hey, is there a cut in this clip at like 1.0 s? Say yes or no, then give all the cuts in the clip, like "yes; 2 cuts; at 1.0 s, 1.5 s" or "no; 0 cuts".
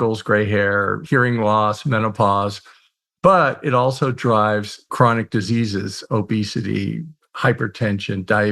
yes; 2 cuts; at 1.0 s, 4.9 s